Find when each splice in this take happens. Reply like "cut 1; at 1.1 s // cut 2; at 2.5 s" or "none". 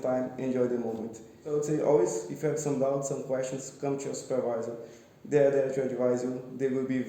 cut 1; at 1.5 s